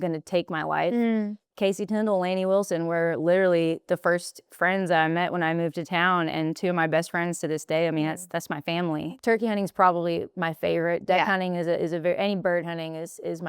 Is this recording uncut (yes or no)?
no